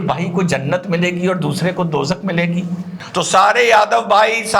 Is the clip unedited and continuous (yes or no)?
no